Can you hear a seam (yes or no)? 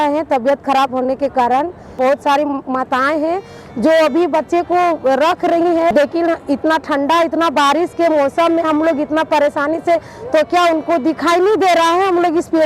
yes